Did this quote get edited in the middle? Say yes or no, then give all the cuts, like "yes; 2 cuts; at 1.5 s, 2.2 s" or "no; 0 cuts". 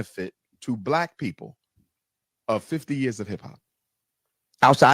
yes; 1 cut; at 2.8 s